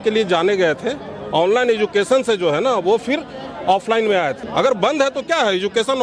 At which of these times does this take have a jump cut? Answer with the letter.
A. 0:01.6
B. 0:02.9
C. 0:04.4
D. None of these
C